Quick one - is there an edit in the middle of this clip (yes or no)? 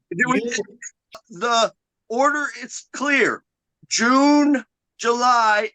yes